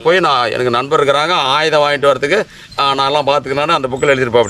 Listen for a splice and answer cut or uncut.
uncut